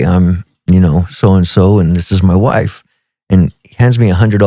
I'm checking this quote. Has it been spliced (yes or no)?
no